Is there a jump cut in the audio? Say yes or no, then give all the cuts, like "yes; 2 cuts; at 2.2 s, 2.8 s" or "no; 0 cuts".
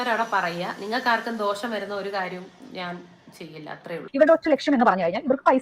yes; 1 cut; at 4.0 s